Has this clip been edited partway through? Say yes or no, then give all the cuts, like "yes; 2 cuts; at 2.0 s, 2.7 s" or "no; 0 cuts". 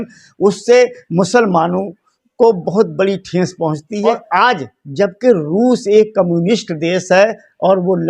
yes; 1 cut; at 4.1 s